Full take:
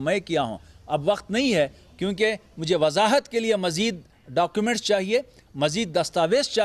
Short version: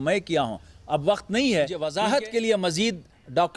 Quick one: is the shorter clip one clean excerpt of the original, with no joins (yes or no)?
no